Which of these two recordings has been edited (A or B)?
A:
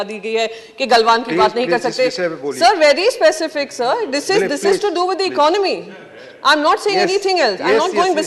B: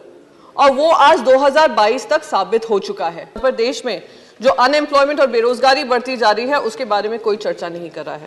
B